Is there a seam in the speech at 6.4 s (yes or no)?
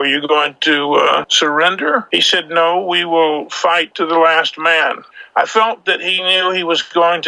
no